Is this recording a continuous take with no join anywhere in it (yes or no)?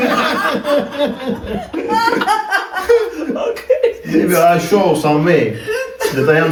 yes